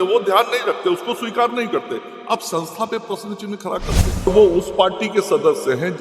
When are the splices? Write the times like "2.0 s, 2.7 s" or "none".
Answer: 4.2 s